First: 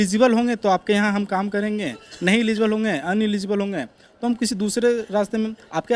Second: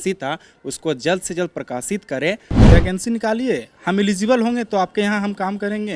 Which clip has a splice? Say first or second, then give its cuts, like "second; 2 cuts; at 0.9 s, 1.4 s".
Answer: second; 1 cut; at 2.7 s